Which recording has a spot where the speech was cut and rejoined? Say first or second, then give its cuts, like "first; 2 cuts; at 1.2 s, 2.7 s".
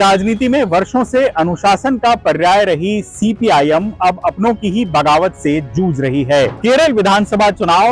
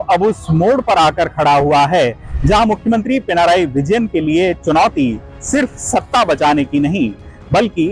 first; 1 cut; at 6.6 s